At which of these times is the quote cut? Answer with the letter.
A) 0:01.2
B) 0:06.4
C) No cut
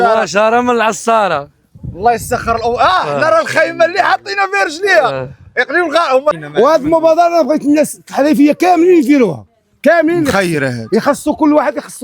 B